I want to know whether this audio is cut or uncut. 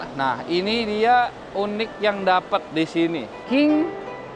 cut